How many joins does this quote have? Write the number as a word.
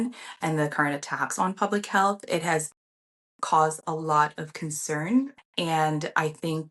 one